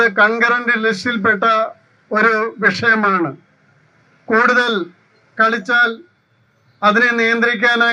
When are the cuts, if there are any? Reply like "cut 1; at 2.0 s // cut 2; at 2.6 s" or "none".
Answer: none

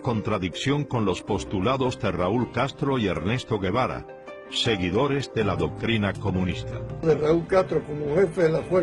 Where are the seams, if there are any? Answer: cut 1; at 7.0 s

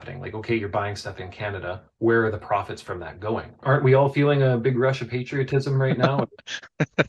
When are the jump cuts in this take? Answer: cut 1; at 3.6 s

